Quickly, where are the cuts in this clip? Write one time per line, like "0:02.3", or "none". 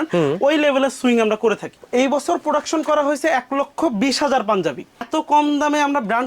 0:01.8
0:04.9